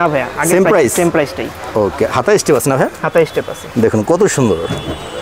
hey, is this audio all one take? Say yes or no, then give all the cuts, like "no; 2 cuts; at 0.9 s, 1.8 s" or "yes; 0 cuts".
yes; 0 cuts